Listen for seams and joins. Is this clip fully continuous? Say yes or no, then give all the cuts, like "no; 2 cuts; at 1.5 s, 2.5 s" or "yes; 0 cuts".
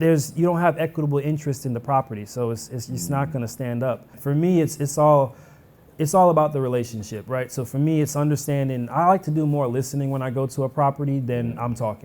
no; 1 cut; at 4.1 s